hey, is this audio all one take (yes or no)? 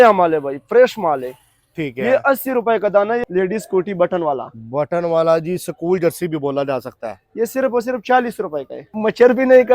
no